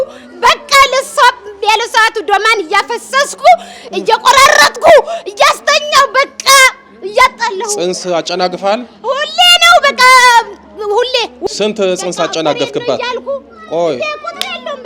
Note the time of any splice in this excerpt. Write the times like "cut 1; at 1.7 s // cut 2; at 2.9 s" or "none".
cut 1; at 11.4 s